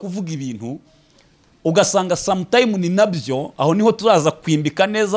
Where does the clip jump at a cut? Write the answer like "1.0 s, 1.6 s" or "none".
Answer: none